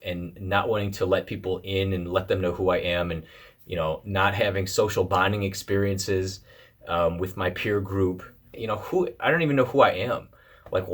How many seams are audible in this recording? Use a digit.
1